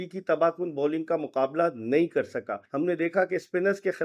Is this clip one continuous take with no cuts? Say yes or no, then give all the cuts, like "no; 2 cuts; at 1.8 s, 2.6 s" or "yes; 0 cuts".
no; 1 cut; at 2.6 s